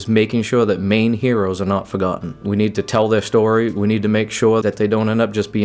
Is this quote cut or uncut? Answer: cut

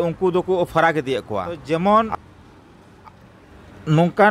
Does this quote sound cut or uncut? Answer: cut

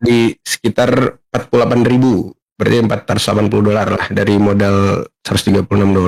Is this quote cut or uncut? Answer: uncut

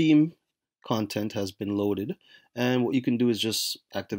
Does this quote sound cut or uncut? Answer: uncut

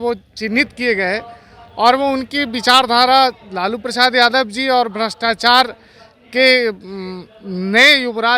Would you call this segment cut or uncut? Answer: uncut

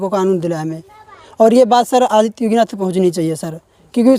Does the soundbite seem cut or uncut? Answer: uncut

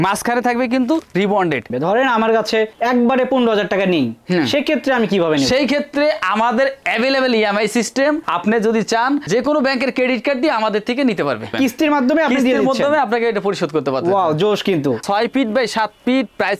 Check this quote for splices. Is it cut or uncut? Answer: cut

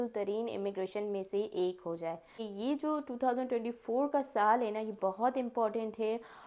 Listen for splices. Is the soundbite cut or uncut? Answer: cut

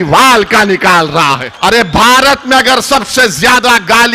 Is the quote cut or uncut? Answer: cut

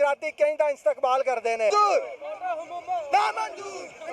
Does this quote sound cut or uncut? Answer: cut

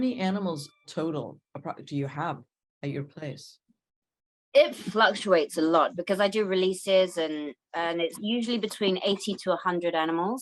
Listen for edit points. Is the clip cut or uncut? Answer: uncut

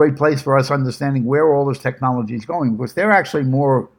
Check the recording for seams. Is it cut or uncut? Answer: uncut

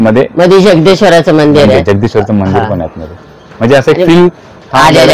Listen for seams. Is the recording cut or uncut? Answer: uncut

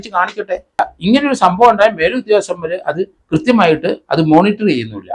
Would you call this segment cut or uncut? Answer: cut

